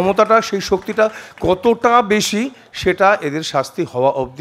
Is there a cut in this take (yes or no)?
no